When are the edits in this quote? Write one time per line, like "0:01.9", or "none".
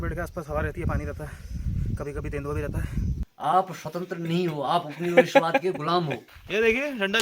0:03.3
0:06.2